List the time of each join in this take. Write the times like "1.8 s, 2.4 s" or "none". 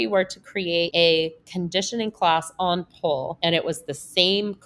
0.9 s, 3.3 s